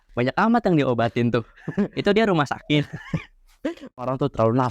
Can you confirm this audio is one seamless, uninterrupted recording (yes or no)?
yes